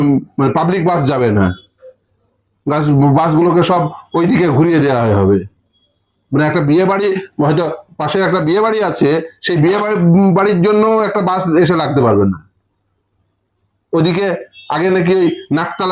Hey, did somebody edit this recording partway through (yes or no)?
no